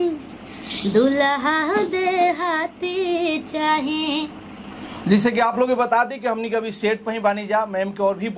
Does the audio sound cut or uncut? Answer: uncut